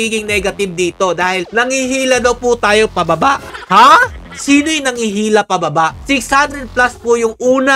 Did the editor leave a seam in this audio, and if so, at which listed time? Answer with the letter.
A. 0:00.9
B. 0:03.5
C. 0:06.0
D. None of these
B